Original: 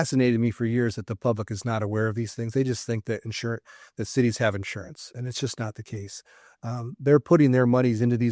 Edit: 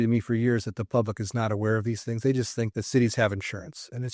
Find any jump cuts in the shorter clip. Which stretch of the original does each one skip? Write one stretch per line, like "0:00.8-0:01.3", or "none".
0:03.0-0:03.9